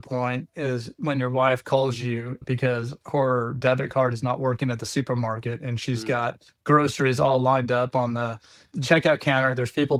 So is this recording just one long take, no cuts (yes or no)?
yes